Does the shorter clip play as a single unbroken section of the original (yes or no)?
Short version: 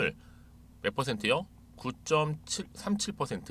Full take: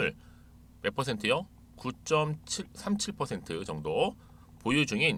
yes